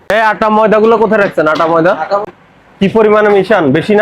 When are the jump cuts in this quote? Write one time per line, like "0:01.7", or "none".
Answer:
0:02.2